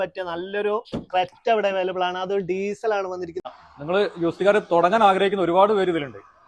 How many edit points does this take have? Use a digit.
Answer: 1